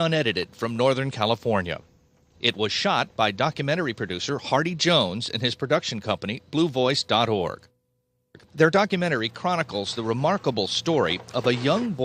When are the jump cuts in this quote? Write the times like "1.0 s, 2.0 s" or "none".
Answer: 8.8 s